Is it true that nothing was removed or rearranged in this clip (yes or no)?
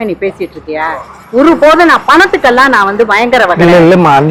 yes